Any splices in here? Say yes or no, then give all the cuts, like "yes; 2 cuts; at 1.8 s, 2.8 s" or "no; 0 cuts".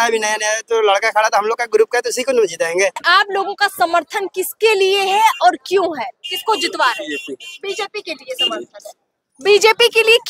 yes; 1 cut; at 3.0 s